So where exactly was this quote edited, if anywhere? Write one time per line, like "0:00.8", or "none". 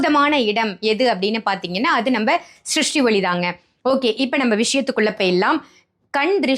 none